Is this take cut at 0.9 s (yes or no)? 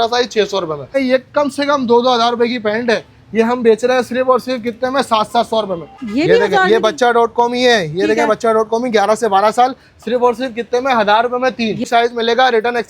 yes